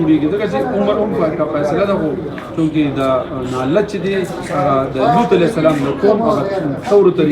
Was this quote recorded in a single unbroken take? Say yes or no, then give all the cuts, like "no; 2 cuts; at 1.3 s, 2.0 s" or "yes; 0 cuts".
yes; 0 cuts